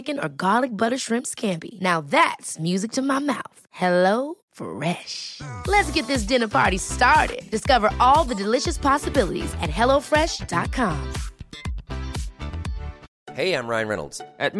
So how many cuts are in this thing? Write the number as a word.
one